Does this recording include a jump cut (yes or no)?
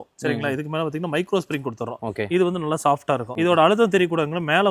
yes